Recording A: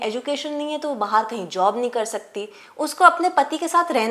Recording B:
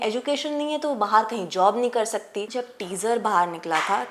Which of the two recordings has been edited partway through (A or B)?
B